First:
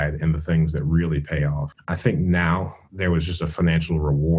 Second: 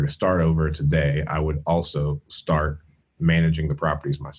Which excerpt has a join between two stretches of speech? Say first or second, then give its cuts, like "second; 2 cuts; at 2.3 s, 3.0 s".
first; 2 cuts; at 1.7 s, 2.8 s